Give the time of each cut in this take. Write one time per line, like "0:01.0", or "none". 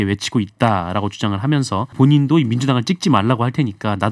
0:01.9